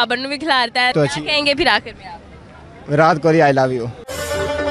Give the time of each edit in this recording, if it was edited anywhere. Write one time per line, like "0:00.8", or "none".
0:00.9